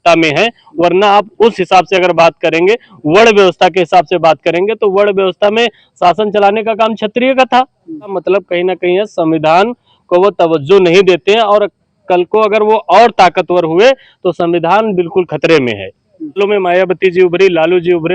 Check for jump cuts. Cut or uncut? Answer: cut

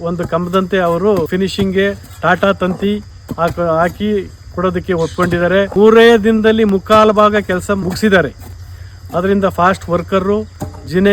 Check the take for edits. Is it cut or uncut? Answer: cut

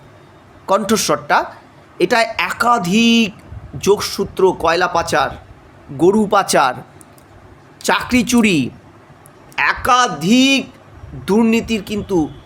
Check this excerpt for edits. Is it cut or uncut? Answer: uncut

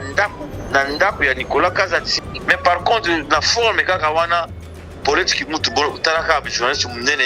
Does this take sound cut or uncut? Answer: cut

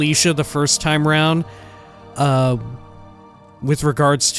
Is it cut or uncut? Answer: uncut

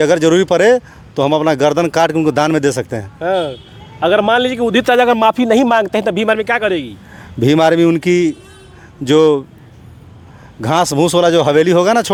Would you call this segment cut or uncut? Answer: uncut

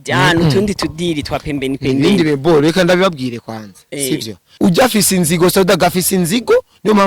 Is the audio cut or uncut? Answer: cut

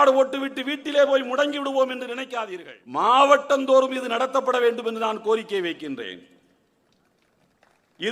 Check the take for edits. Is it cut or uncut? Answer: cut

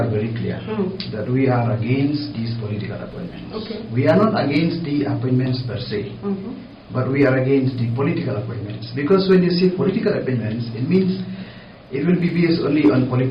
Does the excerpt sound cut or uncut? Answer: uncut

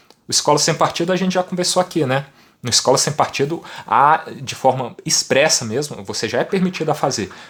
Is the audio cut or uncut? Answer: uncut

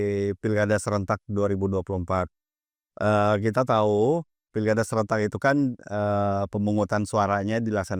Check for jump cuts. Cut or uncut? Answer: uncut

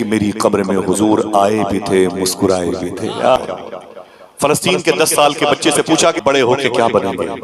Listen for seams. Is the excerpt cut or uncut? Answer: cut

